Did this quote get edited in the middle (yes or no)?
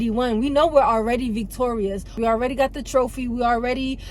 yes